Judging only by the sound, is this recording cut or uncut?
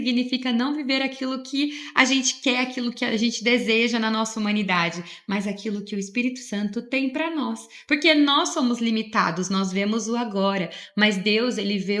uncut